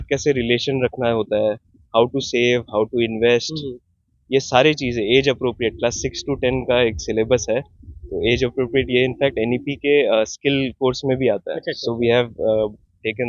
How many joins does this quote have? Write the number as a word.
zero